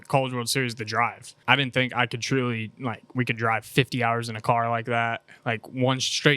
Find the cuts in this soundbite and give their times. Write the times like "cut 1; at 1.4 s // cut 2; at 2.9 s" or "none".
cut 1; at 1.3 s